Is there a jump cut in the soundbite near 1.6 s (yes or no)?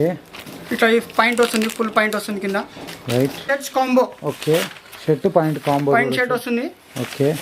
no